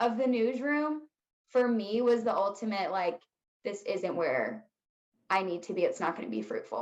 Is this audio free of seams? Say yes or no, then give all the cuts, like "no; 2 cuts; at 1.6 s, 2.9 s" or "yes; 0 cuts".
yes; 0 cuts